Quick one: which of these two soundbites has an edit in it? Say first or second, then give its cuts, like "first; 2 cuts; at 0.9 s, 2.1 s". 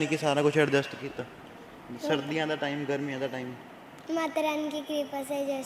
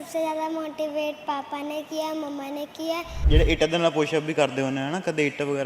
second; 1 cut; at 3.2 s